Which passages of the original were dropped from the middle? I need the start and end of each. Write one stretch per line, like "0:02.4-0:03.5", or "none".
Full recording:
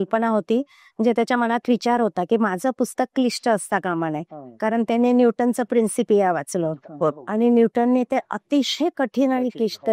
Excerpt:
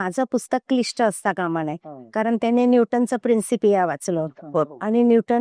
none